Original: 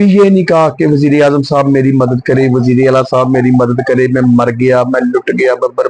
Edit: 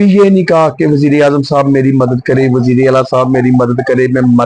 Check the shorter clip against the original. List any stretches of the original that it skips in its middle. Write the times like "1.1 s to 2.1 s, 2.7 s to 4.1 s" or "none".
none